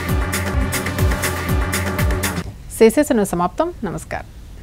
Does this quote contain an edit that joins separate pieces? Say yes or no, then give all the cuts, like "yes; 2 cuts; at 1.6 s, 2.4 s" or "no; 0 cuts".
no; 0 cuts